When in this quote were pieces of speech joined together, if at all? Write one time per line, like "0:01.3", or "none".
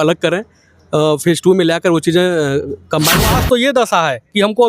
0:03.3